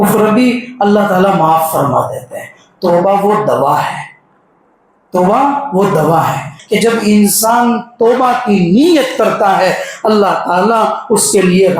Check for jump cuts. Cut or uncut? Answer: cut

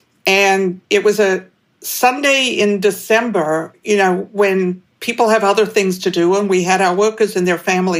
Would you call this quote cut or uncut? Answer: uncut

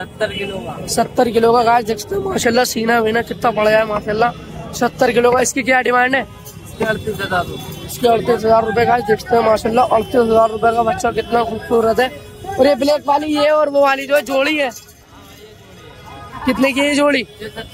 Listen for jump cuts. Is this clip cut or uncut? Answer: uncut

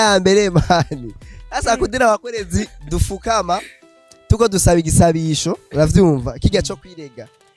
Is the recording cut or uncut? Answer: uncut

